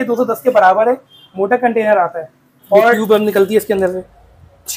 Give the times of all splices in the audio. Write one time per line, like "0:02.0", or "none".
0:03.0